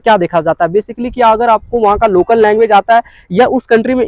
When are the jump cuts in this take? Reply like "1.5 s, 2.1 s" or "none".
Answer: none